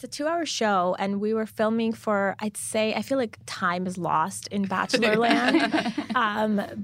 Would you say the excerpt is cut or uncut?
uncut